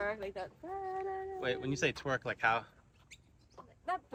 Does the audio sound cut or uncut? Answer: uncut